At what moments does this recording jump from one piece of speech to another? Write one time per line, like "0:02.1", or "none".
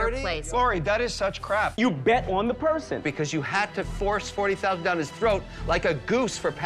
0:01.8